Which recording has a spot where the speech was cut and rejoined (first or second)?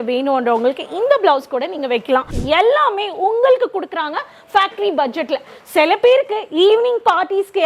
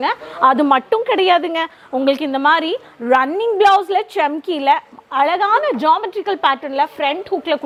first